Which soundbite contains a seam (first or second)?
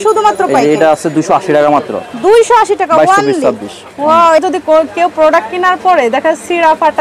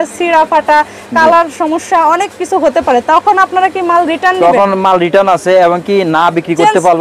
first